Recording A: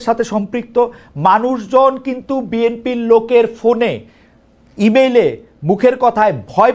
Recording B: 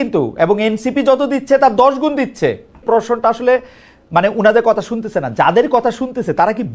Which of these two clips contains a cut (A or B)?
B